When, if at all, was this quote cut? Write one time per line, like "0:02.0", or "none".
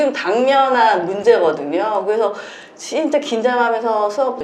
none